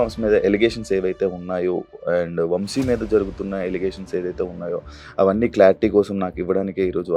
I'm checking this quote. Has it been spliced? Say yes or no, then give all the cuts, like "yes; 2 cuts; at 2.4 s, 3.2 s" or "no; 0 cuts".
no; 0 cuts